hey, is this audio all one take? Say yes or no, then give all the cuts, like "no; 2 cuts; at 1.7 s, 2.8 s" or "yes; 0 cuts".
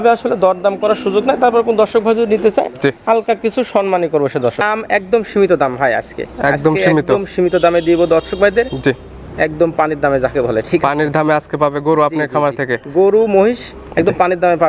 no; 1 cut; at 4.6 s